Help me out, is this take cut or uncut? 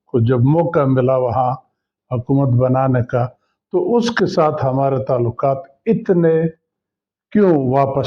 uncut